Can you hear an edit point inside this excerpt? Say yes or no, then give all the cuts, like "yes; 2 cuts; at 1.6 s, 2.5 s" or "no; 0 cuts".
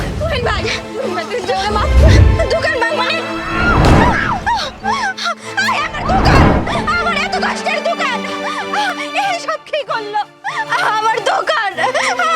no; 0 cuts